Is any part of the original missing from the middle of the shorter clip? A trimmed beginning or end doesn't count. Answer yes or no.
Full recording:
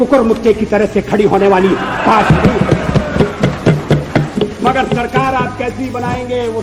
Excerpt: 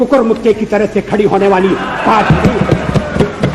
no